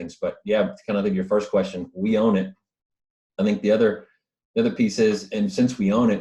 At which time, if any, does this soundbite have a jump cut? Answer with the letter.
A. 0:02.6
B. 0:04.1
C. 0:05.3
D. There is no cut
D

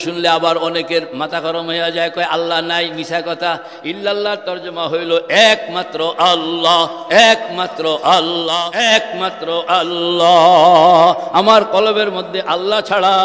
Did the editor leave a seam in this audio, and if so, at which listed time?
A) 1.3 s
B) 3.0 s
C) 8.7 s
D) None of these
C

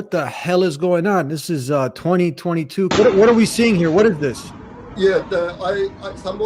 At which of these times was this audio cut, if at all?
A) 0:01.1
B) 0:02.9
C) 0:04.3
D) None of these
B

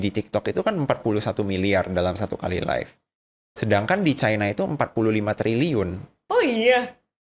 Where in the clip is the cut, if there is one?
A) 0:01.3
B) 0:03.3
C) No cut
C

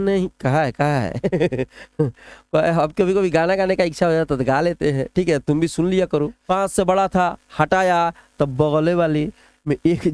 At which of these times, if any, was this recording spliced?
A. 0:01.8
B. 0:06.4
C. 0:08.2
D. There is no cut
B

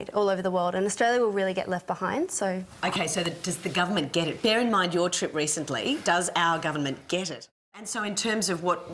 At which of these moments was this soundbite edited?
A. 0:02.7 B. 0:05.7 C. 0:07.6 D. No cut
C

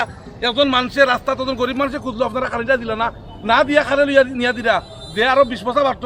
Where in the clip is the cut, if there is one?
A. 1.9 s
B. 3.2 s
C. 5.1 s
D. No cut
D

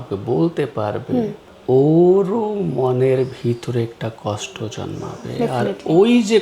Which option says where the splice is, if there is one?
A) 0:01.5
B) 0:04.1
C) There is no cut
A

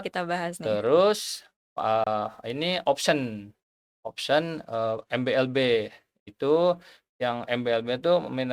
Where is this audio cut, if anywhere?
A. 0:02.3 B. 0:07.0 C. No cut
C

